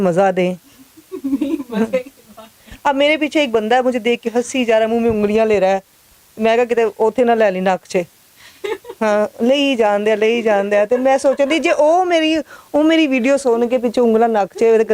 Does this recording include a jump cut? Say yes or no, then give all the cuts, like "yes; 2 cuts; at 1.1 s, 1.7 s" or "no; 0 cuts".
no; 0 cuts